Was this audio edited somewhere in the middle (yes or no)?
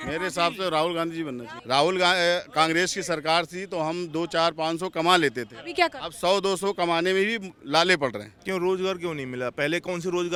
no